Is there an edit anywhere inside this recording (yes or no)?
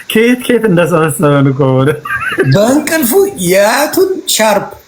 no